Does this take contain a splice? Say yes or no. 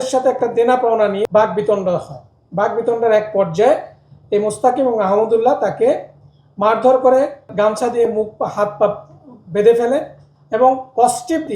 yes